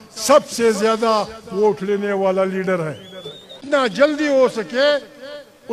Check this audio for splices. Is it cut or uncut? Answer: cut